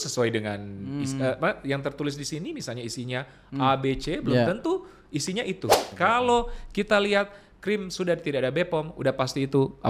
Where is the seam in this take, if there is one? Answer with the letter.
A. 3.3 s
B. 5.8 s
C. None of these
B